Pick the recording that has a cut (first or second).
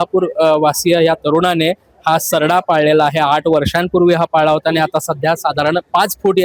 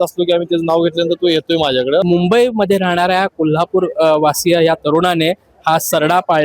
second